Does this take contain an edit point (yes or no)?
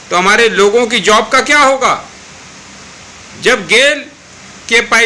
no